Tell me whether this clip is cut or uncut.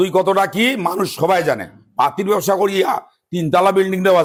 uncut